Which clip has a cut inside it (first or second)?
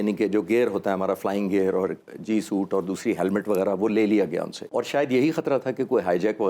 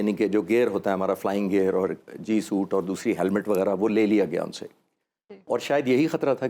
first